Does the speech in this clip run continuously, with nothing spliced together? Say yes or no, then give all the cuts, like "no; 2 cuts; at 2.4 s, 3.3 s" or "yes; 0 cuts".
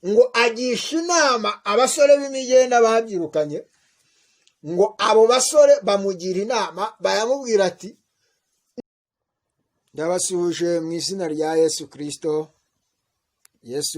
no; 1 cut; at 8.8 s